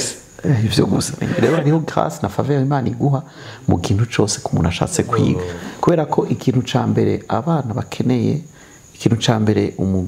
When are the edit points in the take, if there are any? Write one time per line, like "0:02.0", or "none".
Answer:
0:01.1
0:05.6